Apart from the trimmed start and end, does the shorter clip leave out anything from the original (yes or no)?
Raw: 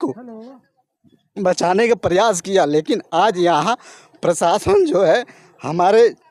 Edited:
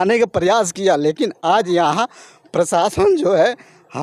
no